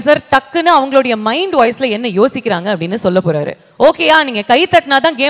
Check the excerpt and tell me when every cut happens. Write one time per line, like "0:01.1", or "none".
none